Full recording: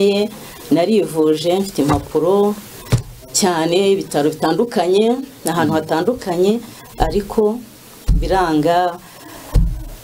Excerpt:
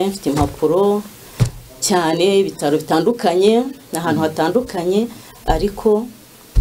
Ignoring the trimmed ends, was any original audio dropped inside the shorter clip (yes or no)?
no